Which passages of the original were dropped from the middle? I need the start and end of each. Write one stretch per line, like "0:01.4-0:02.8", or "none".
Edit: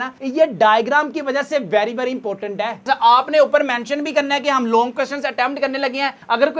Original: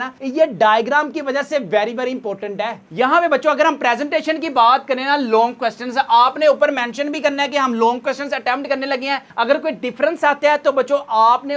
0:02.8-0:05.8